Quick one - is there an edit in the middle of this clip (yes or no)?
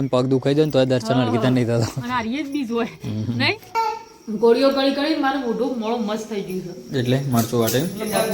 yes